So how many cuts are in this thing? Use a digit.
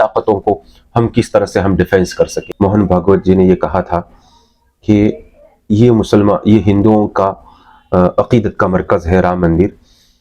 1